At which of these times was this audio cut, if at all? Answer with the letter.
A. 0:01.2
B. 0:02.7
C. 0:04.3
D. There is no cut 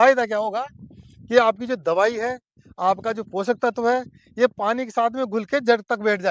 D